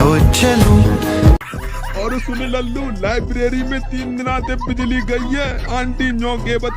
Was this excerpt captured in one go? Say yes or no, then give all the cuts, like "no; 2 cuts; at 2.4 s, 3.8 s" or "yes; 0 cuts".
no; 1 cut; at 1.4 s